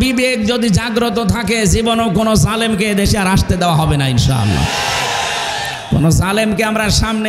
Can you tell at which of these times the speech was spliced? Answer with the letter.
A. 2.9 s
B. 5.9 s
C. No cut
C